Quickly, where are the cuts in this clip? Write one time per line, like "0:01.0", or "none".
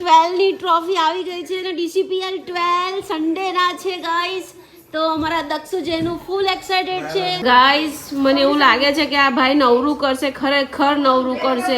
0:07.4